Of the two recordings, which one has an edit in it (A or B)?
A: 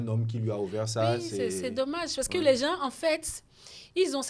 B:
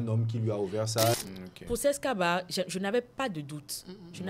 B